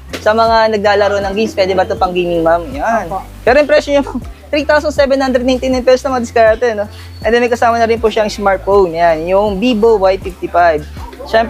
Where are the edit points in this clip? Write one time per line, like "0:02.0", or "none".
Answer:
none